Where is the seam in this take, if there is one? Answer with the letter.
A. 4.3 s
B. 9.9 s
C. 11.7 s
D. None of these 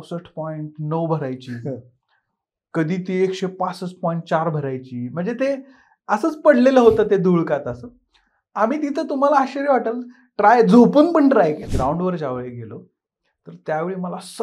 C